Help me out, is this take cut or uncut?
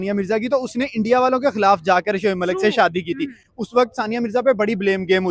uncut